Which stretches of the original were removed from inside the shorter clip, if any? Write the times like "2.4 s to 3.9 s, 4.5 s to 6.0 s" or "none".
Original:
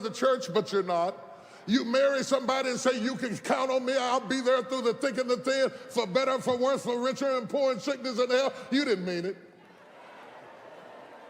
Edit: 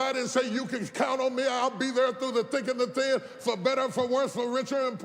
none